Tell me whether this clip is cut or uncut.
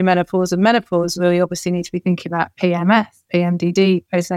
uncut